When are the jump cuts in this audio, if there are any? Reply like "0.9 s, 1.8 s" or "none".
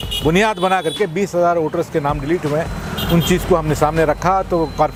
none